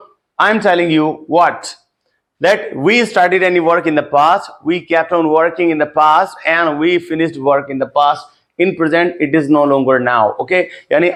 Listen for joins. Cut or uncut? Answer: uncut